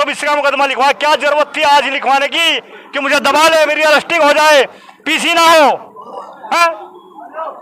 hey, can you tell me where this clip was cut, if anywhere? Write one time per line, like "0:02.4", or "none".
none